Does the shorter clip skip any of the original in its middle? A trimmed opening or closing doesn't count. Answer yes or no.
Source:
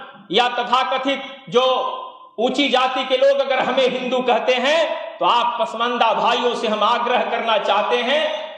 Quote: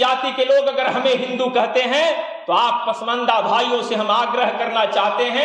no